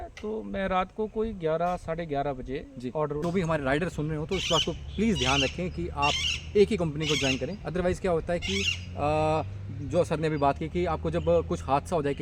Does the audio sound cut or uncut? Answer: cut